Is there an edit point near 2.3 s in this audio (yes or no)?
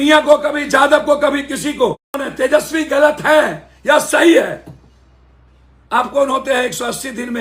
yes